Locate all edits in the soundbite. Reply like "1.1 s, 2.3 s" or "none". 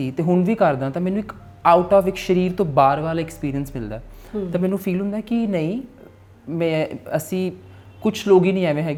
none